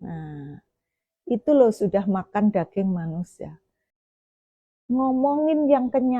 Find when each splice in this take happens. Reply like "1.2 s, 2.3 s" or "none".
4.2 s